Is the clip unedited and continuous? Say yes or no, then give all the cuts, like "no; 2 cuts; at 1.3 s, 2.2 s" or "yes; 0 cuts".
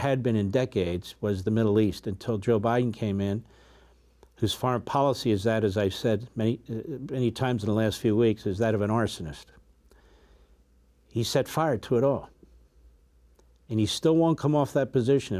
yes; 0 cuts